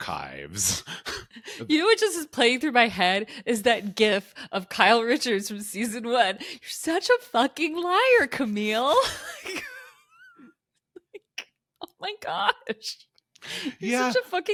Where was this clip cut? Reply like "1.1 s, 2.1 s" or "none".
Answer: none